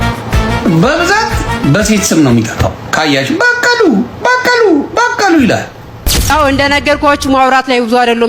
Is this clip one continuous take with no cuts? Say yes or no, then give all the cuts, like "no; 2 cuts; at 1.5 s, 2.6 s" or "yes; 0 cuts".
no; 1 cut; at 6.3 s